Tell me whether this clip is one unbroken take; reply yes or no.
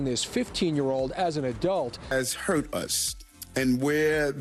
yes